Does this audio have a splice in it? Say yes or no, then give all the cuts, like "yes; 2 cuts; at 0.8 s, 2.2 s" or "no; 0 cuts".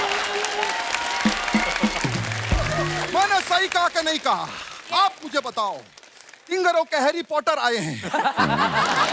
no; 0 cuts